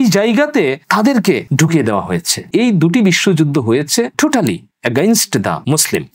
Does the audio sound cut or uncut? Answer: cut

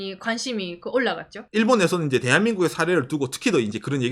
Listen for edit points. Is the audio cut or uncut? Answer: cut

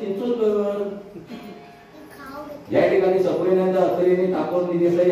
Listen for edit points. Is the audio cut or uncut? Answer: uncut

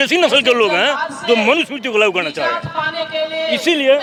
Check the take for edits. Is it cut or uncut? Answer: uncut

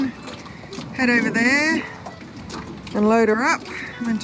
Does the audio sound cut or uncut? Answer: uncut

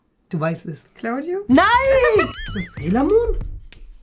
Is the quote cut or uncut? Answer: cut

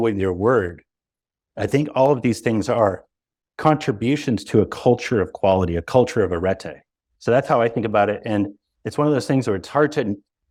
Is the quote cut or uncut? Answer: uncut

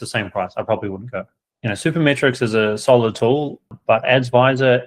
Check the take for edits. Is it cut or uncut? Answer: cut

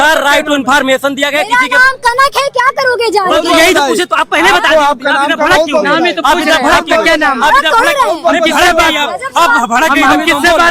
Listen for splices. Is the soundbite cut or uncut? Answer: uncut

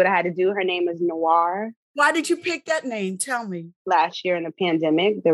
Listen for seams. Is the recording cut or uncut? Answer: cut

